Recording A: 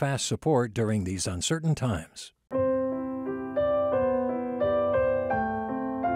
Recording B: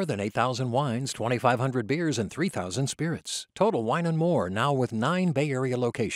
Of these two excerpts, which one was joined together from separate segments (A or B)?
A